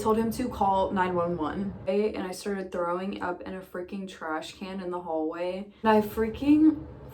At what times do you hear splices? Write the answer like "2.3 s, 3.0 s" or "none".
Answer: 1.9 s, 5.8 s